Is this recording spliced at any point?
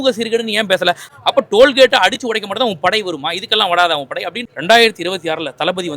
yes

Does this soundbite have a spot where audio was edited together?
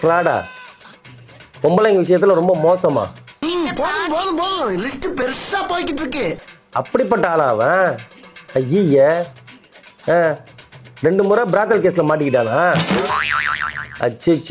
no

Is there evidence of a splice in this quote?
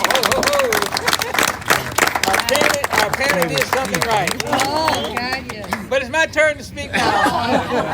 no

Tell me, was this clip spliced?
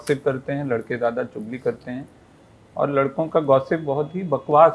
no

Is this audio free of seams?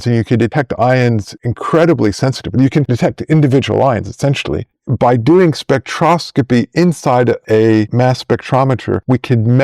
no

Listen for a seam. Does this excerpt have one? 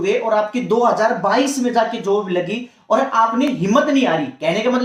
no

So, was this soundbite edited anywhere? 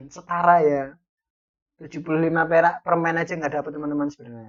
no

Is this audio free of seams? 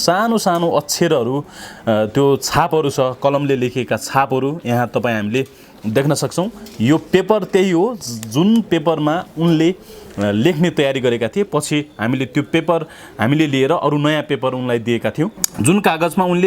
no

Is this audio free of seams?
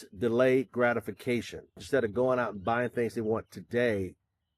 no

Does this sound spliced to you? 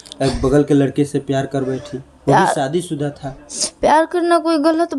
no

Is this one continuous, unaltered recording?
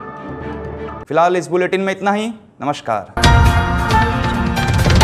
yes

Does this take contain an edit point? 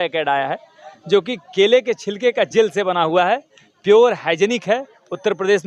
no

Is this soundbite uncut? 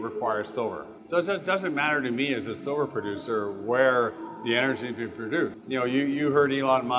no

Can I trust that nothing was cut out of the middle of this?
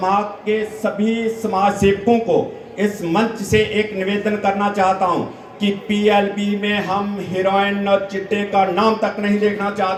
yes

